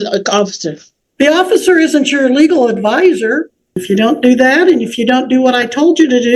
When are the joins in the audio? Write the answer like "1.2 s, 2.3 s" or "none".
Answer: 3.8 s